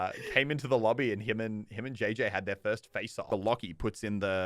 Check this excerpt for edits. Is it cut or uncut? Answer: cut